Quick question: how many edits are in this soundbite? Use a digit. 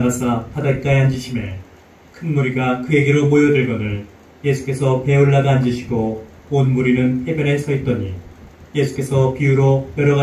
0